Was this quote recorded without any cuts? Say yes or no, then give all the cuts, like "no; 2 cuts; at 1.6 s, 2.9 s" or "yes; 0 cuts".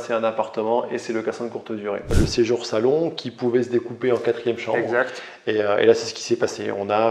no; 1 cut; at 2.1 s